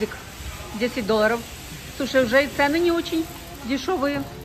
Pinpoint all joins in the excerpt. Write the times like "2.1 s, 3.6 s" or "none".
none